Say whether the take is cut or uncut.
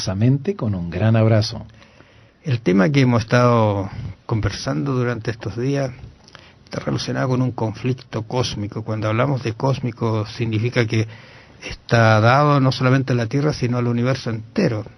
cut